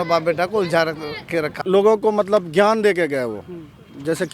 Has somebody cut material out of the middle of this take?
yes; 1 cut; at 1.5 s

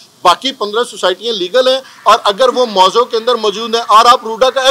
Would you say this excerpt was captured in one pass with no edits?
yes; 0 cuts

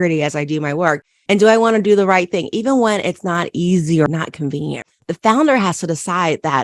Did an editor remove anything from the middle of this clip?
yes; 1 cut; at 4.9 s

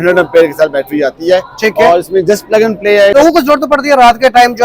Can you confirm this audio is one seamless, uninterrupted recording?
no; 1 cut; at 3.1 s

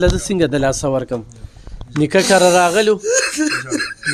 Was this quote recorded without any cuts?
yes; 0 cuts

